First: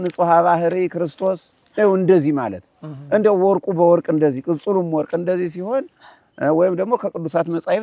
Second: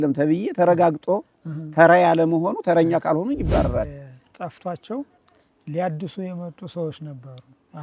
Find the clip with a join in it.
second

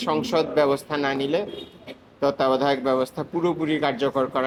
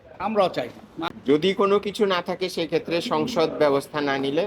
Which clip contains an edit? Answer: second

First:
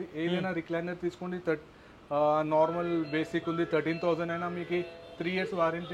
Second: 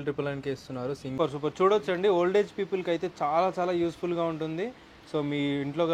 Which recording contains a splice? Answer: second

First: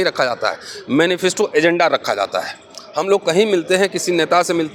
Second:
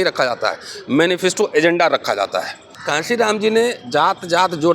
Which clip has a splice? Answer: second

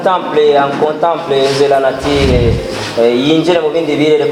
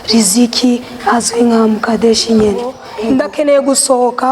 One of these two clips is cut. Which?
second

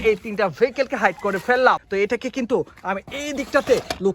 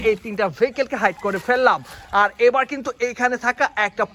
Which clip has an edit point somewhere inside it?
first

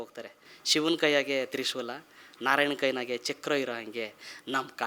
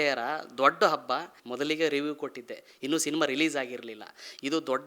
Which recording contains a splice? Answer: second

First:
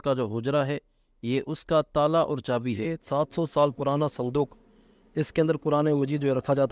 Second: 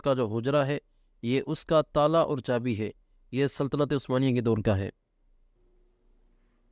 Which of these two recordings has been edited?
first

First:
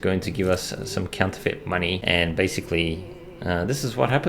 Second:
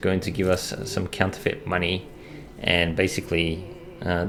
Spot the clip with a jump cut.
first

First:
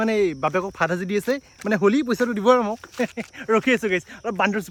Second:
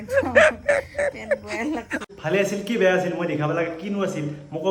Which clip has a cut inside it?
second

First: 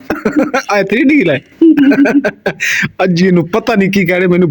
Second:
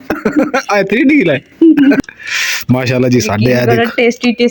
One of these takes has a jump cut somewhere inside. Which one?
second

